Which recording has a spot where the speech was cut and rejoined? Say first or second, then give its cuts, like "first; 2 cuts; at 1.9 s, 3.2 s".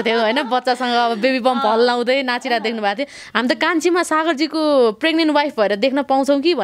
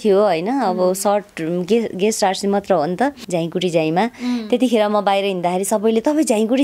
second; 1 cut; at 3.2 s